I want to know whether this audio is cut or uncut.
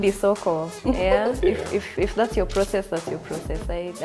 uncut